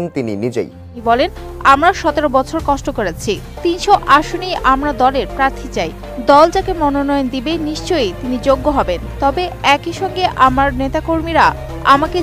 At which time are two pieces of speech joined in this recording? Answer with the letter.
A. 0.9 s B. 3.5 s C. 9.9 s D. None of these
A